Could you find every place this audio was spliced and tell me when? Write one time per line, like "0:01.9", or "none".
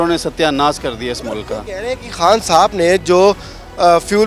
none